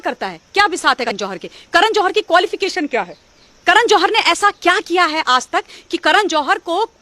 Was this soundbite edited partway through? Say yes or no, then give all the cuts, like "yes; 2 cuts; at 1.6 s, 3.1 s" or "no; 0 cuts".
yes; 1 cut; at 1.1 s